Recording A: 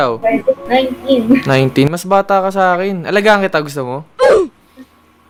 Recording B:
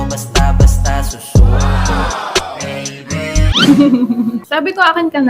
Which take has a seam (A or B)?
B